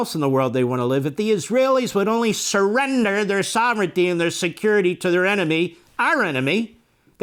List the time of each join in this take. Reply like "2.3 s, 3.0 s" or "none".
none